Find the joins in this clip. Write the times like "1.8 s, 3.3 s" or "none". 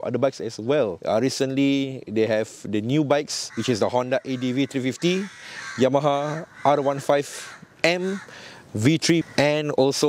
1.0 s